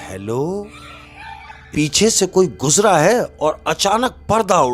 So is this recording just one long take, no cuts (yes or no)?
no